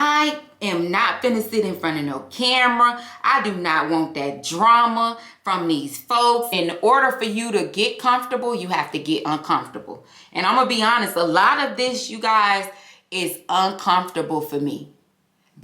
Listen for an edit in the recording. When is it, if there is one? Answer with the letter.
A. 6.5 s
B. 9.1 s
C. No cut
A